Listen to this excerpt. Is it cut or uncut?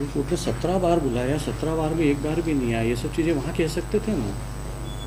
uncut